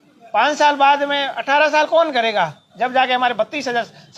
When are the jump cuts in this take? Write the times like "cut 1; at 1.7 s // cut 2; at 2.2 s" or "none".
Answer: none